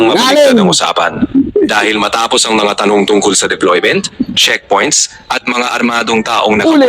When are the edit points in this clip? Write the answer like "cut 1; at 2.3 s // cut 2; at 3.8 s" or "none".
none